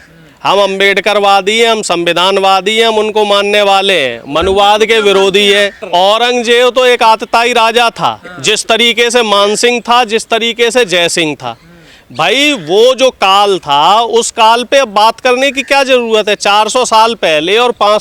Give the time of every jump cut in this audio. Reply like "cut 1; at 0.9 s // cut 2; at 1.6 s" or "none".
none